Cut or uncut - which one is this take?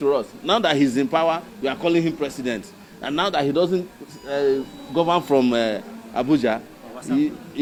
uncut